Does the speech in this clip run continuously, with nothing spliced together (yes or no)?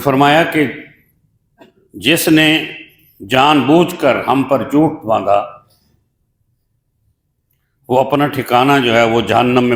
yes